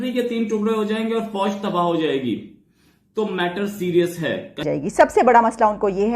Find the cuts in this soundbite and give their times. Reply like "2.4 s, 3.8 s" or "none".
4.6 s